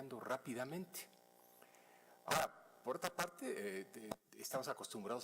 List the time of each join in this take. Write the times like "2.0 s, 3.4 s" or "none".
4.0 s